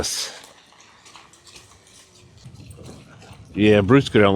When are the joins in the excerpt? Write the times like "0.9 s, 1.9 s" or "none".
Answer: 2.5 s